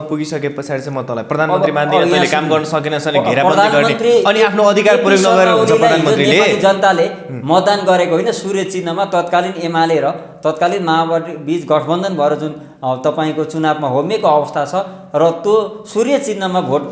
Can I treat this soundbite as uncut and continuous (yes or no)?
yes